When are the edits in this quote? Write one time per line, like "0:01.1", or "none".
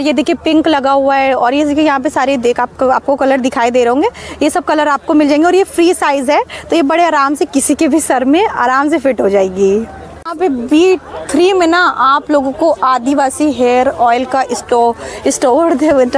none